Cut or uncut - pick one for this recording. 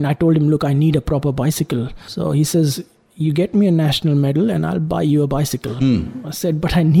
cut